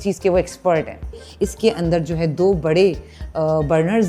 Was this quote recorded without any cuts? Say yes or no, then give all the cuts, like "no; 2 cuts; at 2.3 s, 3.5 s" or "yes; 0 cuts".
no; 1 cut; at 1.2 s